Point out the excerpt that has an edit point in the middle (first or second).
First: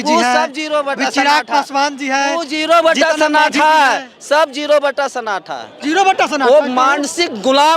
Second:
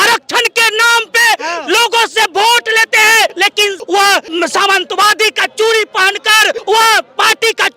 second